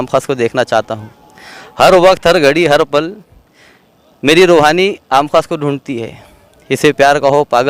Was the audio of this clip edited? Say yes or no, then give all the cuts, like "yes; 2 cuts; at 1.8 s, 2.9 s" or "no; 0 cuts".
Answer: no; 0 cuts